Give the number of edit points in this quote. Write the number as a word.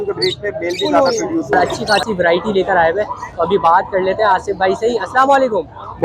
one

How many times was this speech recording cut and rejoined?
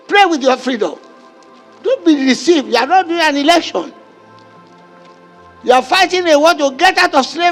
zero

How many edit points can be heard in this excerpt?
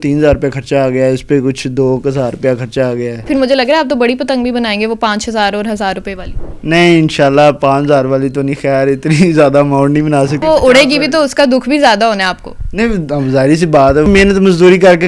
three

